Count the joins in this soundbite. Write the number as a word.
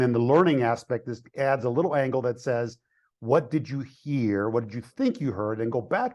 zero